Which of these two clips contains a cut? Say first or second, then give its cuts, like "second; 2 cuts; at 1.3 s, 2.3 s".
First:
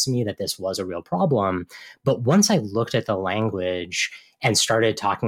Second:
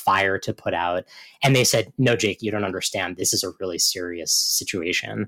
second; 1 cut; at 3.2 s